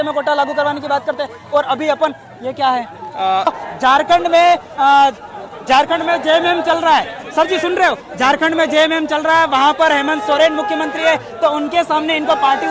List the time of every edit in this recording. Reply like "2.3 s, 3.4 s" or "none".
3.5 s